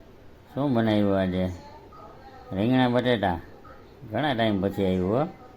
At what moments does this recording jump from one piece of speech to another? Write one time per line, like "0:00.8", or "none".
none